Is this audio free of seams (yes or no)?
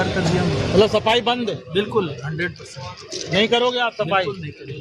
yes